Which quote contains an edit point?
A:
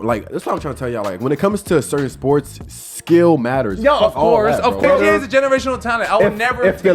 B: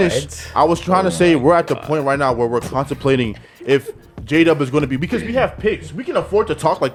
A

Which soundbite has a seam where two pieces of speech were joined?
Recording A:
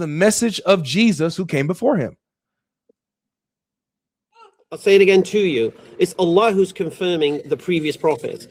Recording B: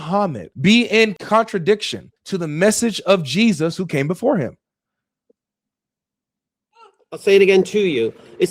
B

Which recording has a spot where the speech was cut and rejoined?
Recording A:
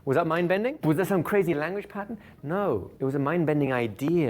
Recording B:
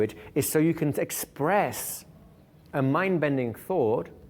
A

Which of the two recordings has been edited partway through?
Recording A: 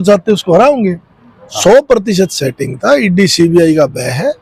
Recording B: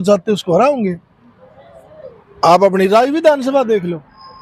A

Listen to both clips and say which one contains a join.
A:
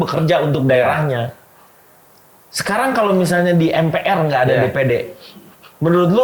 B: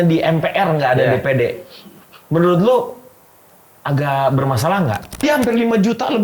B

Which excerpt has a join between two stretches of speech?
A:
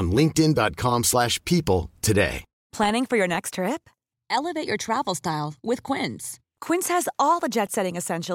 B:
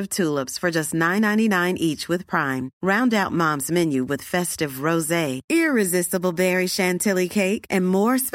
A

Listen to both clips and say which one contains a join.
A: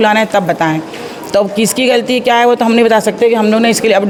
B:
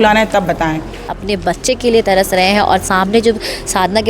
B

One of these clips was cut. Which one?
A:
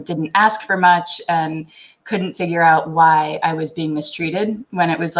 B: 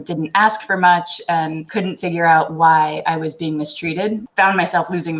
B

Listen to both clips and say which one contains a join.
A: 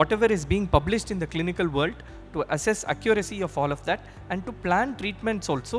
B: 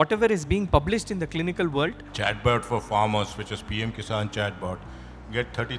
B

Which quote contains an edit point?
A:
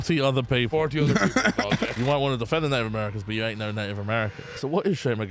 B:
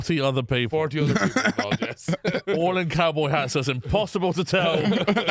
A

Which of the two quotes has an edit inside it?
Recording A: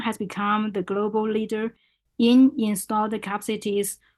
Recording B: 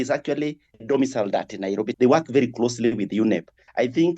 B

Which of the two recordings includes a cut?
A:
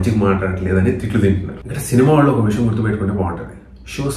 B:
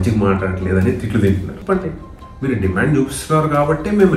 B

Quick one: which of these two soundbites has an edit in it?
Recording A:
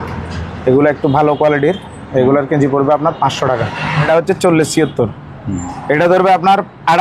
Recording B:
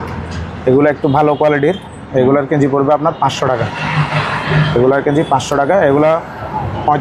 A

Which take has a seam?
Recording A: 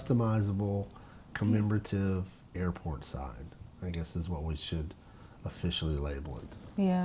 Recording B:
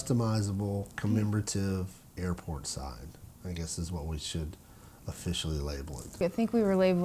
B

